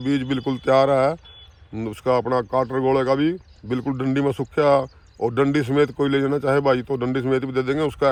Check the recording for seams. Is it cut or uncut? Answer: uncut